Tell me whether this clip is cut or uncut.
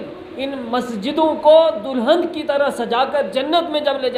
uncut